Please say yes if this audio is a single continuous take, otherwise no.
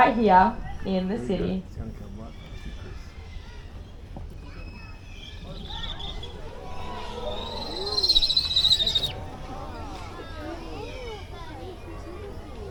yes